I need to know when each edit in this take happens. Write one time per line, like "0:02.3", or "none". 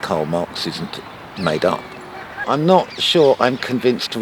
0:02.4